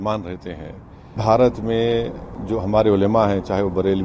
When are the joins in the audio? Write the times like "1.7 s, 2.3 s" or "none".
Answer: 1.2 s